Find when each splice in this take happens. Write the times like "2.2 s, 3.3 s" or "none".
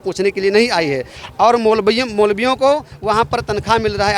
none